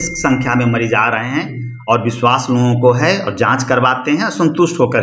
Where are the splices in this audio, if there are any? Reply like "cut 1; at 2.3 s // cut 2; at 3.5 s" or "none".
none